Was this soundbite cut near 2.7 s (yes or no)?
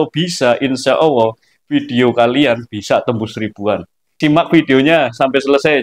no